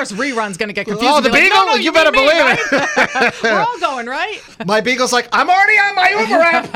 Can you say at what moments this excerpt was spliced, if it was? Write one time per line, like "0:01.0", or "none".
0:04.5

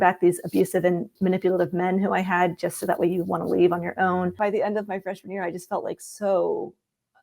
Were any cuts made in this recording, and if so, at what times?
0:01.1
0:04.4

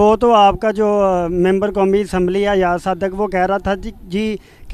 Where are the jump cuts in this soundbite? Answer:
none

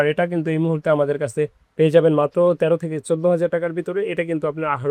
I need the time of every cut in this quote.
none

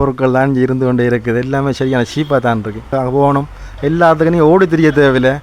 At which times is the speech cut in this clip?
0:02.9

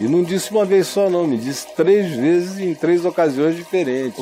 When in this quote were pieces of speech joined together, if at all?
none

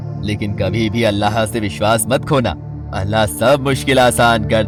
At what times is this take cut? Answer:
none

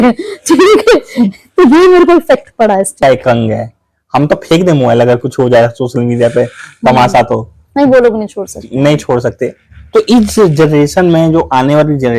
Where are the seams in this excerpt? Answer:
0:03.0

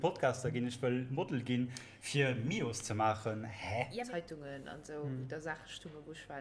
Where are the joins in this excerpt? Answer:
0:04.0

